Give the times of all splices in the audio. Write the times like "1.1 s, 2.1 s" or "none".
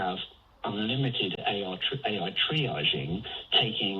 none